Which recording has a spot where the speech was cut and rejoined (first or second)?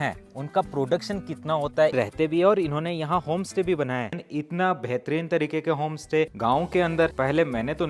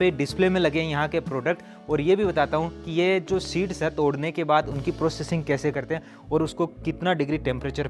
first